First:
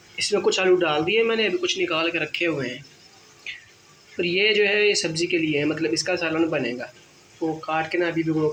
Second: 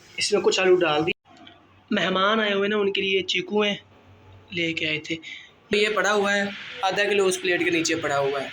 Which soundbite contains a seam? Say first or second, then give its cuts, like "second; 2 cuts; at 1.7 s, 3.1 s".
second; 2 cuts; at 1.1 s, 5.7 s